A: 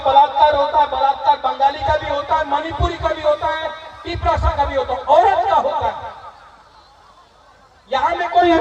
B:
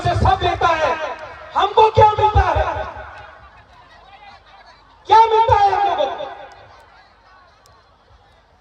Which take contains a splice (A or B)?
B